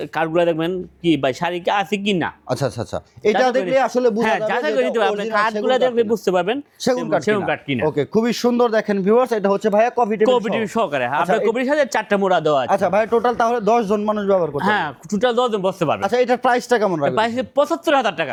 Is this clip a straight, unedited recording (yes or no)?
yes